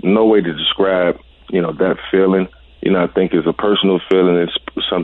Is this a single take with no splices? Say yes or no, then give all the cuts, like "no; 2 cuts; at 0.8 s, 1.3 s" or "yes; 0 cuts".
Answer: no; 2 cuts; at 1.3 s, 2.6 s